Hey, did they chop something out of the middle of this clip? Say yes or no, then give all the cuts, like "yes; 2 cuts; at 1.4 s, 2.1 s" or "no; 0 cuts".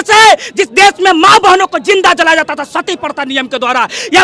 no; 0 cuts